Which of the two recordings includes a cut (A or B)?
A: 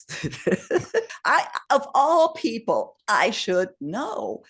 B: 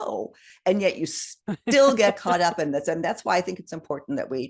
A